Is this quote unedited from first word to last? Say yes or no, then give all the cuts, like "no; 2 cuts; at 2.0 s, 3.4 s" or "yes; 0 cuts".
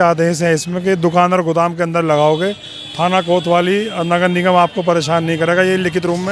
yes; 0 cuts